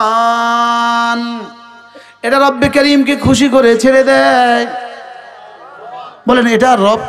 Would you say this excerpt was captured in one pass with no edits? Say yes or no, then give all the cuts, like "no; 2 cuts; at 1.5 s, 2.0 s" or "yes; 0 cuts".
yes; 0 cuts